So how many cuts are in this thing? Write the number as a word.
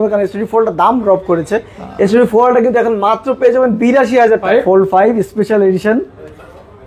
one